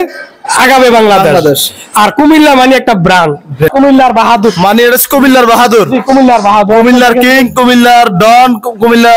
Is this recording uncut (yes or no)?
no